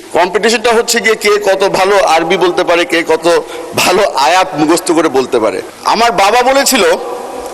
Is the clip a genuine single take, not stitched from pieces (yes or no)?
no